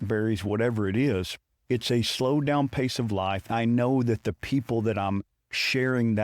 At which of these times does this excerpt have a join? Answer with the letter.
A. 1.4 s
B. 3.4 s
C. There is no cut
B